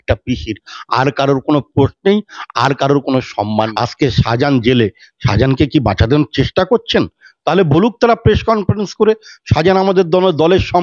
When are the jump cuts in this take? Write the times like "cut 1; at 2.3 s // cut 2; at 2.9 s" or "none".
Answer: cut 1; at 3.7 s